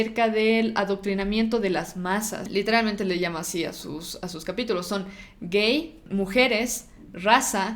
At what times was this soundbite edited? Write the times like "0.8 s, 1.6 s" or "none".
2.4 s, 6.0 s